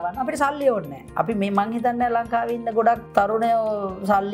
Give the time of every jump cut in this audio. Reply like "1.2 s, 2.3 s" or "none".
3.0 s